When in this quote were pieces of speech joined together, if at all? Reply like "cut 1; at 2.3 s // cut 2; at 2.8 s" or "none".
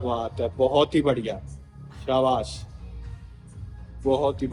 none